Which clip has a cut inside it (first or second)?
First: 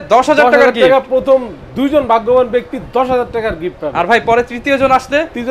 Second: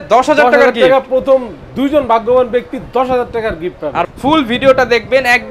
second